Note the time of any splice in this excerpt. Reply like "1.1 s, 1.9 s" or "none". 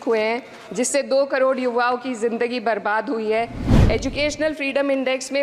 3.7 s